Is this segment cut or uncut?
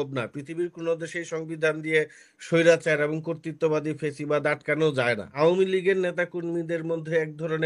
cut